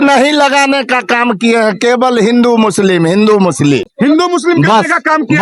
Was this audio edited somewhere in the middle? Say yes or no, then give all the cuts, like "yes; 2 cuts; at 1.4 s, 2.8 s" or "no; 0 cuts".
no; 0 cuts